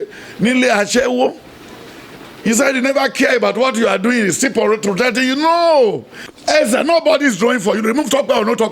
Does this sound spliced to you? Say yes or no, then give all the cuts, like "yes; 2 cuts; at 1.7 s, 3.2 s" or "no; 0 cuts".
yes; 1 cut; at 6.4 s